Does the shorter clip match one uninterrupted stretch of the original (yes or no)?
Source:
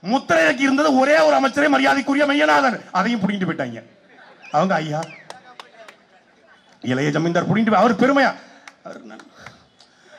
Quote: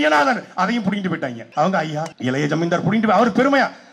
no